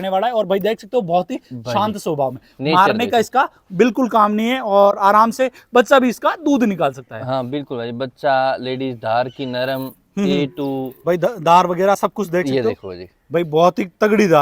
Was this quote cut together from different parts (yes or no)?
no